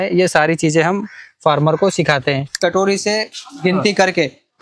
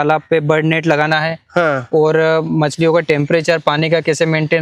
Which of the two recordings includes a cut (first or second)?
first